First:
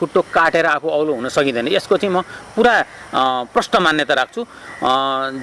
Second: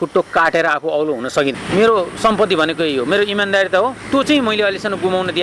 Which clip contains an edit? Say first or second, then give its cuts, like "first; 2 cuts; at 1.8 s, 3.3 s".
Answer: second; 1 cut; at 1.6 s